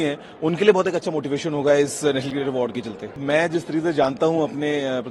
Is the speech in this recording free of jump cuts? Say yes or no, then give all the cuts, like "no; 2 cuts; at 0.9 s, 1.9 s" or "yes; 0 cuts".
no; 1 cut; at 3.2 s